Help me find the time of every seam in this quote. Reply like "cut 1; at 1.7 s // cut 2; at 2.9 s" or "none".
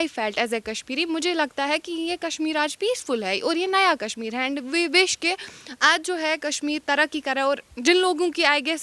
none